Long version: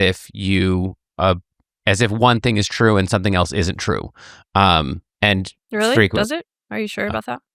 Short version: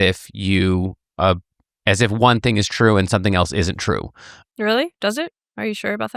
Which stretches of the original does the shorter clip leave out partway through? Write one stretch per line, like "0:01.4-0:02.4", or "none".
0:04.4-0:05.5